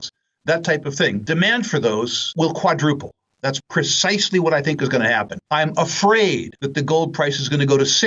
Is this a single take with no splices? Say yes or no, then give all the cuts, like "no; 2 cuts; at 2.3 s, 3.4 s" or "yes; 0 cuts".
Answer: no; 4 cuts; at 1.2 s, 2.2 s, 5.4 s, 6.6 s